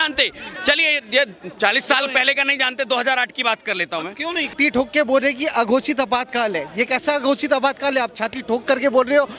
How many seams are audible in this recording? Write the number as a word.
one